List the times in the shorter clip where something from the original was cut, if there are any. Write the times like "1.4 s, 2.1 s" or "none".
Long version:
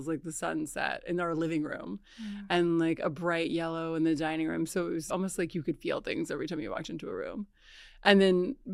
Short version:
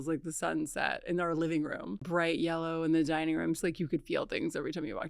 2.0 s, 3.6 s

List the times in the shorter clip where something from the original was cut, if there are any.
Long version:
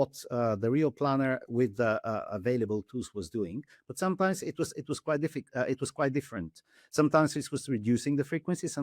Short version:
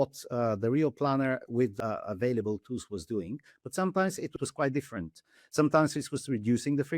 1.8 s, 4.4 s

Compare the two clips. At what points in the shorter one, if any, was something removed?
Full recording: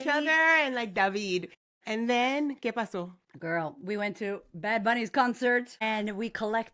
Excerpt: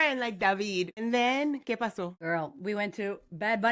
0.9 s, 2.2 s

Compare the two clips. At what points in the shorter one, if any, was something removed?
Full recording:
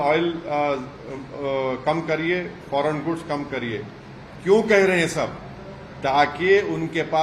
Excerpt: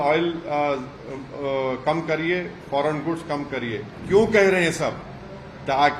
3.9 s

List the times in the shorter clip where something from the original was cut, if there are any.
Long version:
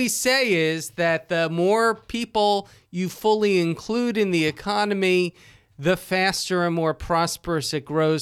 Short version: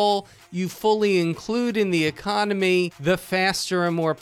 3.0 s

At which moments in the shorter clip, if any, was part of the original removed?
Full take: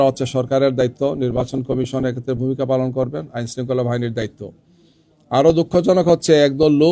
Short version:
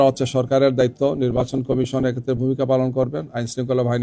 none

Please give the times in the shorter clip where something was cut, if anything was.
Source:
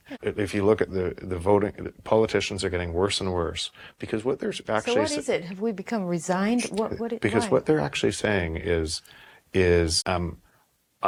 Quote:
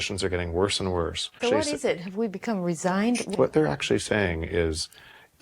1.4 s, 3.3 s

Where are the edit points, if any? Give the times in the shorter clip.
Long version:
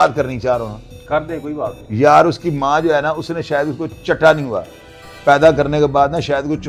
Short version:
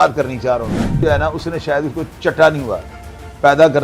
1.0 s

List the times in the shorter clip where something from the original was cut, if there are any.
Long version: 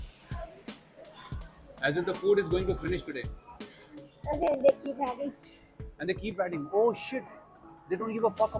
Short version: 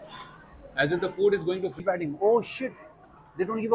1.8 s

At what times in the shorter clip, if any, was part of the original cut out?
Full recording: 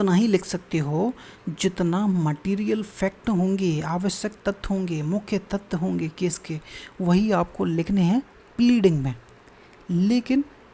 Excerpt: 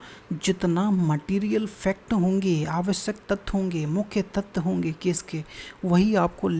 none

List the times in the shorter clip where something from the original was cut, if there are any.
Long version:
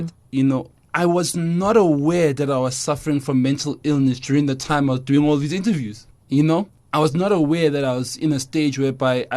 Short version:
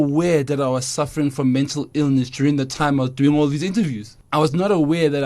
4.2 s

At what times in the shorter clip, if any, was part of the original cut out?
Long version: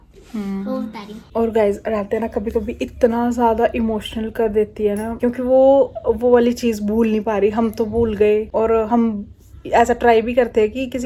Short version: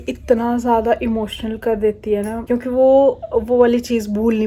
none

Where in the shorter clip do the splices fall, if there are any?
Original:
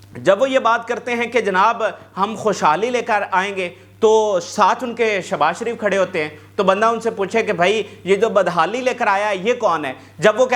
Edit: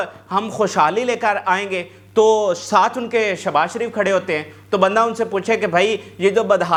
none

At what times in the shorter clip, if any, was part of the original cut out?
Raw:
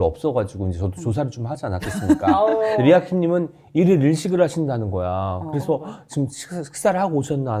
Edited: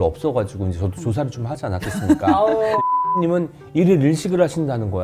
none

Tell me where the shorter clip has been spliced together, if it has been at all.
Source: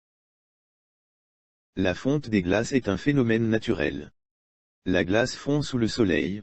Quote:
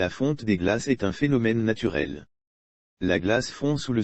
none

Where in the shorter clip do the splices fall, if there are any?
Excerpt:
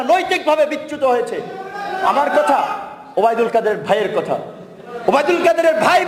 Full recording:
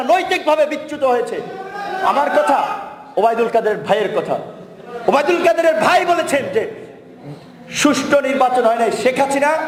none

